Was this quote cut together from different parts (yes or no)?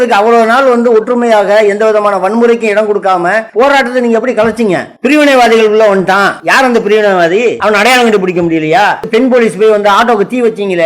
yes